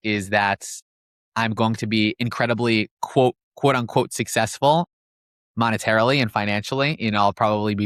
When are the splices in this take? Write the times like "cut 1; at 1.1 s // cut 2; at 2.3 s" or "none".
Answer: none